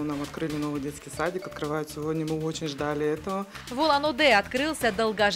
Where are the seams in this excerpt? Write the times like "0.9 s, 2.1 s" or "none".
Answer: 3.6 s